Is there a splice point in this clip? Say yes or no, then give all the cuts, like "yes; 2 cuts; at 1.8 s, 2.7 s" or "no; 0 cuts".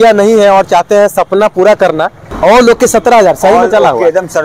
yes; 1 cut; at 2.2 s